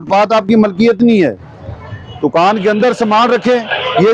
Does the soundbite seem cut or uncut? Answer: uncut